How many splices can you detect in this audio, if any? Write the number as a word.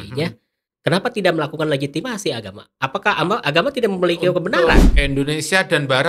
one